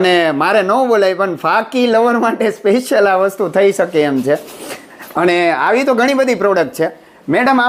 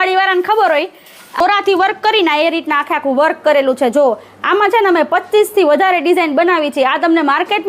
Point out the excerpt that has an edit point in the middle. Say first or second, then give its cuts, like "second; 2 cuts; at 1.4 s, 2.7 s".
second; 1 cut; at 1.4 s